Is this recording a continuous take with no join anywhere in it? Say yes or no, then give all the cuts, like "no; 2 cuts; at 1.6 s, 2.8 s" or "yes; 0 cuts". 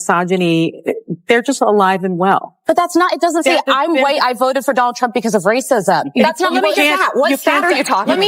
no; 2 cuts; at 2.5 s, 6.1 s